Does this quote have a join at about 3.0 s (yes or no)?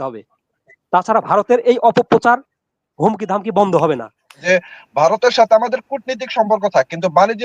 no